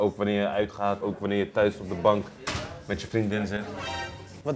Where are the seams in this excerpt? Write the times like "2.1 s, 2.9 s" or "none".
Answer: 1.0 s

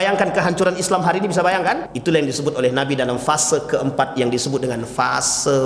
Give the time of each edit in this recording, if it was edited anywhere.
1.9 s

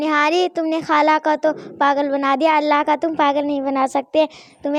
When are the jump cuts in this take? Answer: none

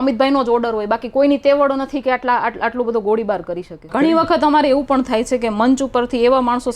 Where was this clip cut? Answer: 3.9 s

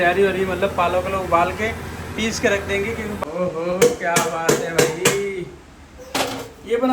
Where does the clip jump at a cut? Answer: 3.2 s

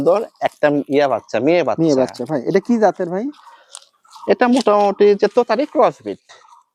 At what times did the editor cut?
none

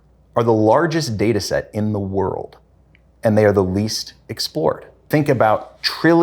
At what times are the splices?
5.1 s

